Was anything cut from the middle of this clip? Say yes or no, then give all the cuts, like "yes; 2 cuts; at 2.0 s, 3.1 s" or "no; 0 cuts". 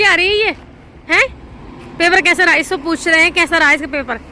no; 0 cuts